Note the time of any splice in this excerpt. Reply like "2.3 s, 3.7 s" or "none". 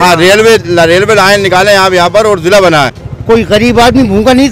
3.1 s